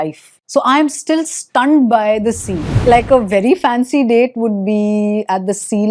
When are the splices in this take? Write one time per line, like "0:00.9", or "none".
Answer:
0:02.7